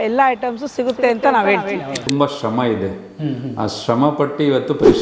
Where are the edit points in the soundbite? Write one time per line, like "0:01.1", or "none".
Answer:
0:02.0